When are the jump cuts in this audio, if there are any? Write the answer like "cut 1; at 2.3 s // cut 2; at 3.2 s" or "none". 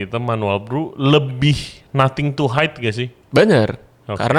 none